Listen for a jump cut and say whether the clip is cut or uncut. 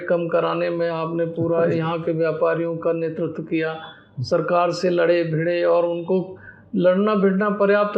uncut